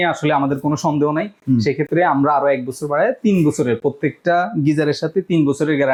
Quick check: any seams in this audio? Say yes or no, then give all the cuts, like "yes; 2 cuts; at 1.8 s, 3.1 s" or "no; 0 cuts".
no; 0 cuts